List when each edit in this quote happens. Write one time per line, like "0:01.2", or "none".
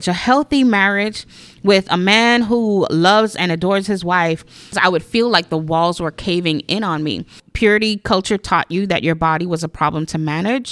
0:04.8
0:07.4